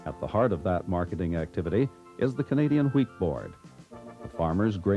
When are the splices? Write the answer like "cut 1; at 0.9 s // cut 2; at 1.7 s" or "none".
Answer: cut 1; at 1.7 s